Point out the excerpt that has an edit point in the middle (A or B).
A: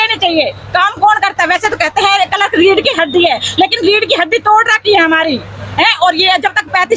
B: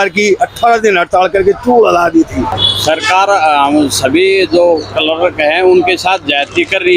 B